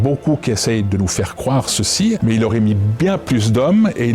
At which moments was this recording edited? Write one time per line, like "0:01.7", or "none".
0:02.2